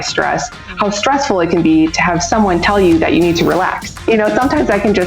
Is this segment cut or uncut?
cut